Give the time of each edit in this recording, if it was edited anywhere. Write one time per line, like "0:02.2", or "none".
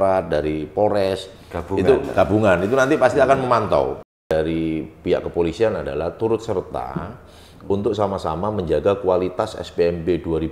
0:04.3